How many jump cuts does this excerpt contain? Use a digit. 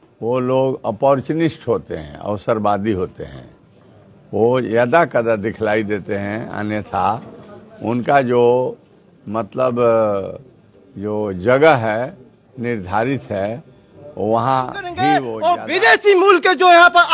1